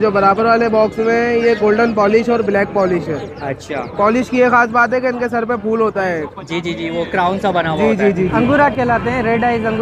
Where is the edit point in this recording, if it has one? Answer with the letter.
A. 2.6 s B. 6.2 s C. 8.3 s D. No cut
C